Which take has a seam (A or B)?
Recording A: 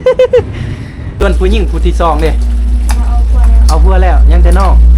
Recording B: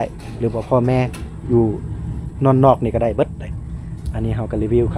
A